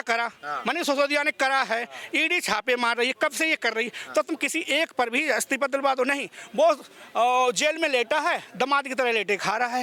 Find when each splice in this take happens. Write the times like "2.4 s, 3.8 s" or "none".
none